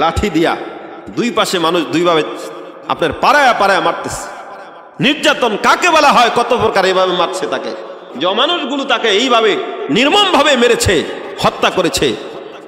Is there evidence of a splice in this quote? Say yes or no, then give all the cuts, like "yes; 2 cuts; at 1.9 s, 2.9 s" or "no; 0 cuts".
yes; 1 cut; at 8.0 s